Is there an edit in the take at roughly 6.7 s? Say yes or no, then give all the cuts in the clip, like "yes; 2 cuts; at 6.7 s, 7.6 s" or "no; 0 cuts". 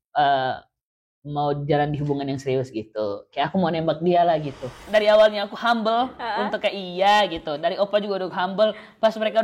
no; 1 cut; at 4.8 s